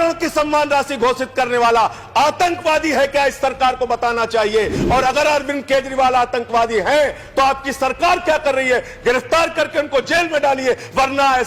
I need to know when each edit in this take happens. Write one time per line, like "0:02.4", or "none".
none